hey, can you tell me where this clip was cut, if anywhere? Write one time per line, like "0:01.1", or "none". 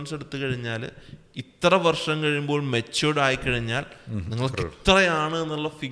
none